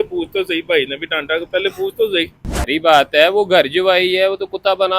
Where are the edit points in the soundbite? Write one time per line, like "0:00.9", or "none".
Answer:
0:02.5